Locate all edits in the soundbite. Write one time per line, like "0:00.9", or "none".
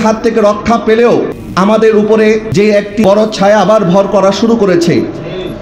0:01.4
0:02.8